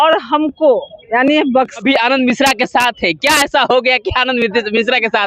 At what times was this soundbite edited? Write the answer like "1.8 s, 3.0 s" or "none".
1.8 s

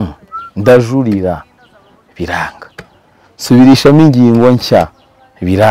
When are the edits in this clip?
none

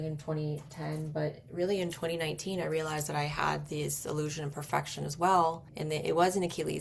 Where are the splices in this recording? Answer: 5.7 s

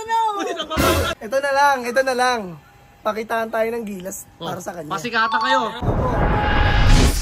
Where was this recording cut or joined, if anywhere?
1.2 s, 5.8 s

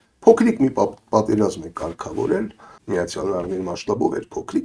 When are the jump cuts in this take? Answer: 2.7 s

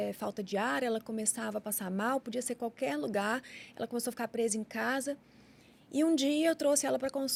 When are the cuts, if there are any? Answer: none

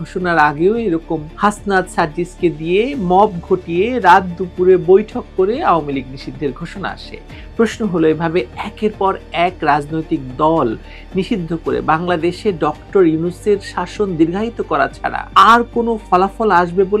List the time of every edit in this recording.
none

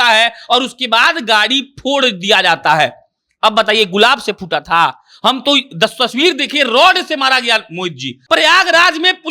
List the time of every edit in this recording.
8.1 s

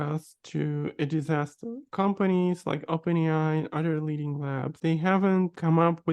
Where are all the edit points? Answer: 1.9 s, 4.8 s

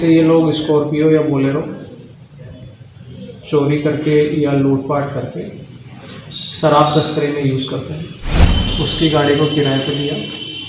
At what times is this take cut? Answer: 8.5 s

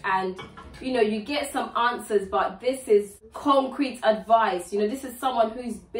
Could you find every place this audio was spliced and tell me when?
3.2 s

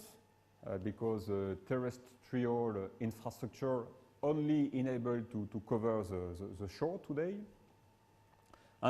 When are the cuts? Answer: none

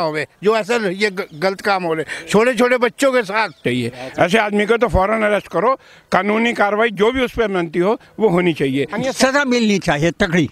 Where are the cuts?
3.6 s, 8.9 s

